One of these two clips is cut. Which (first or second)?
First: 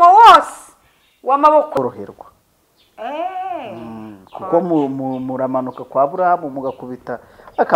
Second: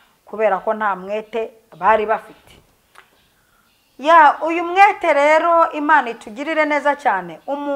first